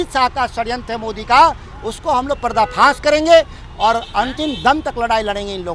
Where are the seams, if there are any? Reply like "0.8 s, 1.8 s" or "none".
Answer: none

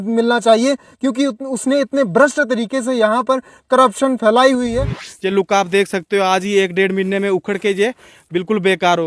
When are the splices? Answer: 4.9 s

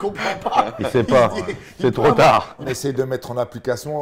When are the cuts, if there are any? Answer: 2.7 s

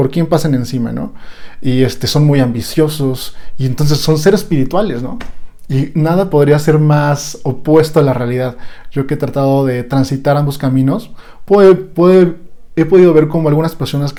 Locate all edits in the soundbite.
none

